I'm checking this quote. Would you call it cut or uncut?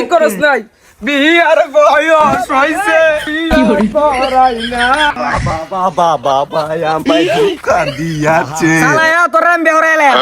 cut